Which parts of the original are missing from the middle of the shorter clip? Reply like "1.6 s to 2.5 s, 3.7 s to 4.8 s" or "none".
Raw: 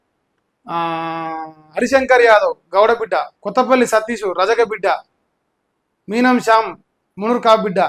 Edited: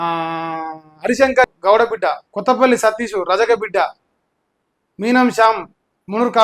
2.2 s to 2.5 s